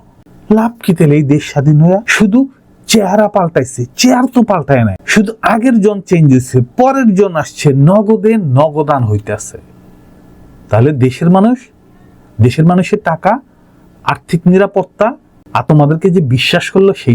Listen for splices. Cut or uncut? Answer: cut